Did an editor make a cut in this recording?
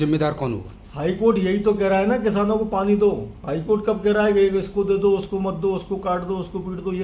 no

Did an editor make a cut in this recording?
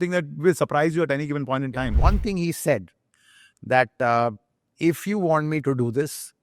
yes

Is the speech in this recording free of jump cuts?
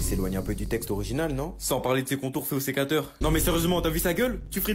no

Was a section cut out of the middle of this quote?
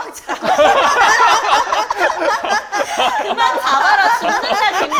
no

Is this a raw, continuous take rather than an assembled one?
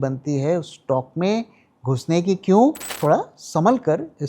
no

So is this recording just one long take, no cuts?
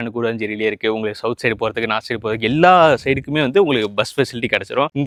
yes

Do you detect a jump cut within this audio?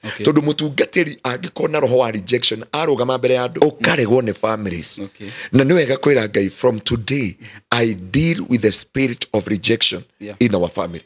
yes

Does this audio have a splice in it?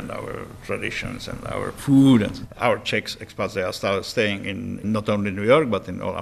yes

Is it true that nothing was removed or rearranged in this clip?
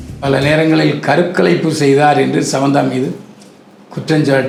yes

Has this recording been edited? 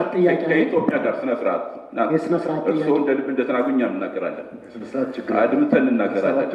no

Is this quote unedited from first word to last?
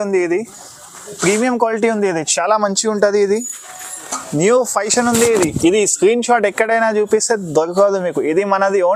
yes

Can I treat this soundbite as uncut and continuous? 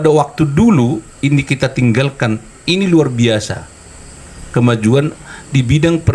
yes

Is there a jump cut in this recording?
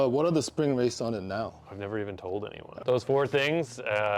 yes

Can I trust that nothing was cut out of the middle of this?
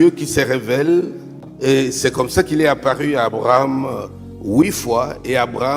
no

